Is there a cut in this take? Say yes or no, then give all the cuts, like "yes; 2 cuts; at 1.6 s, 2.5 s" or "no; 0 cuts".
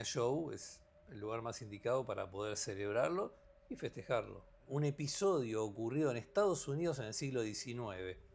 yes; 1 cut; at 4.6 s